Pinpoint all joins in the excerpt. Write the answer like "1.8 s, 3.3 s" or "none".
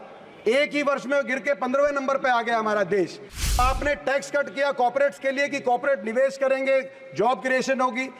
3.6 s